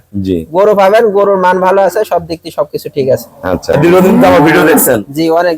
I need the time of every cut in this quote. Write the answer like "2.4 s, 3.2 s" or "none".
3.8 s

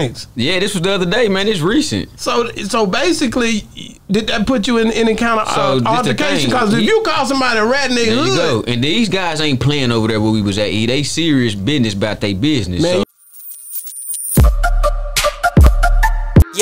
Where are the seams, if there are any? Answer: 13.0 s

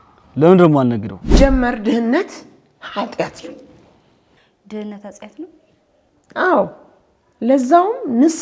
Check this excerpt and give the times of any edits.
1.2 s

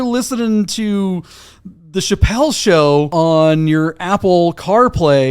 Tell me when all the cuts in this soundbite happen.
3.1 s

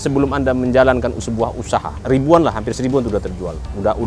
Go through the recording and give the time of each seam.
1.9 s

